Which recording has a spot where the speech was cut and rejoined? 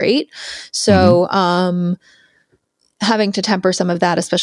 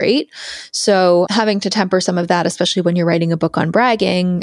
second; 1 cut; at 1.3 s

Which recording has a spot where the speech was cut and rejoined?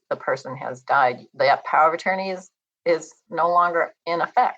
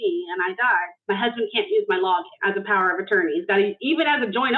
second; 2 cuts; at 0.9 s, 2.3 s

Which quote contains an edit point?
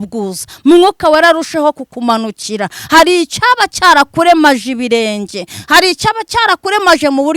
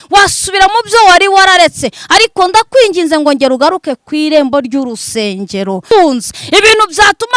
second; 1 cut; at 5.9 s

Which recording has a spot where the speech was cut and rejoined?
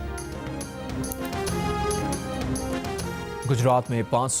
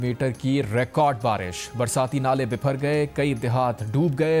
first; 1 cut; at 1.9 s

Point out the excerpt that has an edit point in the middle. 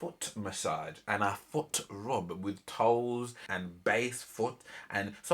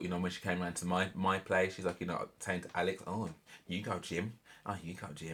first; 1 cut; at 3.4 s

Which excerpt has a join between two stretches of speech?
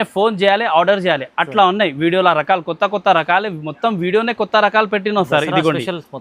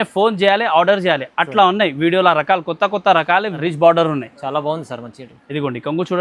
second; 1 cut; at 3.6 s

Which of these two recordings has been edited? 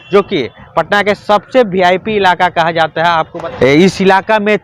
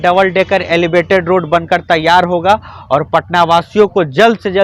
first; 1 cut; at 3.4 s

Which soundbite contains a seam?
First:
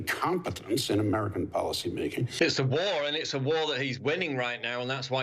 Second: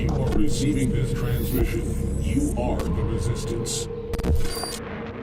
first; 1 cut; at 2.3 s

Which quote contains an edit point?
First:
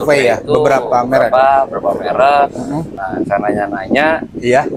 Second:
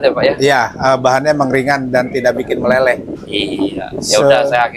first; 1 cut; at 3.0 s

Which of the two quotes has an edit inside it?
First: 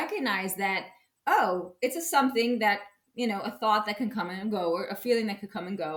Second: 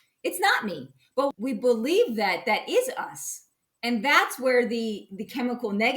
second; 1 cut; at 1.3 s

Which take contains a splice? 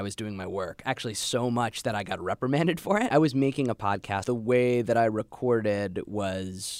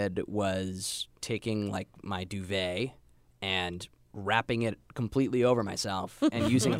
first; 2 cuts; at 3.1 s, 4.2 s

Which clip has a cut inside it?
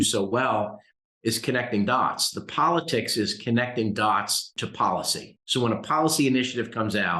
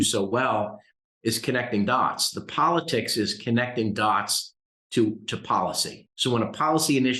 first; 1 cut; at 4.6 s

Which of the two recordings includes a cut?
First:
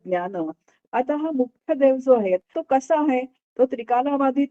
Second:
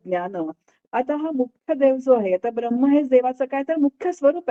first; 1 cut; at 2.5 s

